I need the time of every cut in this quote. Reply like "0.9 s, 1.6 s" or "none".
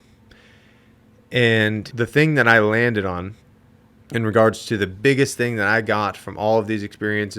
2.0 s